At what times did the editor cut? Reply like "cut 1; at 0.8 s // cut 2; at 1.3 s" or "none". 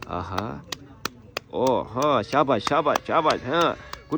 none